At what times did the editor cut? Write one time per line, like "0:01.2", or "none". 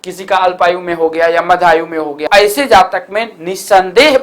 0:02.3